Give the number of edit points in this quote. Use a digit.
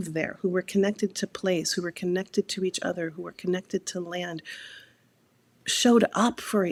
0